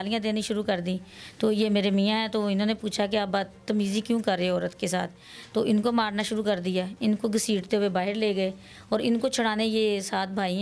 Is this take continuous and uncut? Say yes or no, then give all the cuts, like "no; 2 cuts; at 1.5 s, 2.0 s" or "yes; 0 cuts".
yes; 0 cuts